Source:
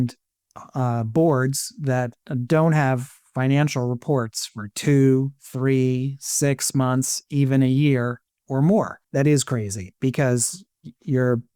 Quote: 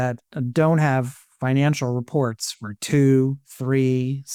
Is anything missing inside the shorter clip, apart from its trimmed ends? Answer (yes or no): no